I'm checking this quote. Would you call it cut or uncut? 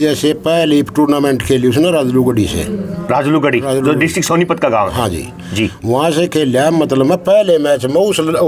uncut